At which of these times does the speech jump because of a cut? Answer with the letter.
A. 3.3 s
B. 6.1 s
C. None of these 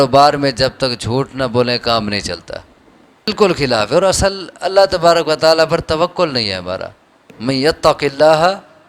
A